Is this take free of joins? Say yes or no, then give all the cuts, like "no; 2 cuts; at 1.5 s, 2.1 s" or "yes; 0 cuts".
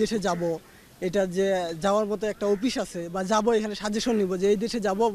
yes; 0 cuts